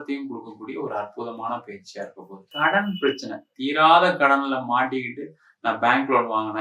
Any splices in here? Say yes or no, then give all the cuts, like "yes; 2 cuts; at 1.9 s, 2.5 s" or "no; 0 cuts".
yes; 1 cut; at 2.5 s